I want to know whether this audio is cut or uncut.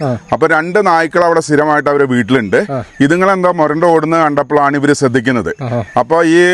uncut